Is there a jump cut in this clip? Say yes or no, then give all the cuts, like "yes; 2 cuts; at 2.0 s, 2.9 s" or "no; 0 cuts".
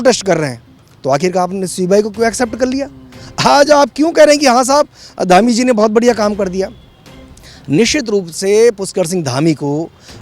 no; 0 cuts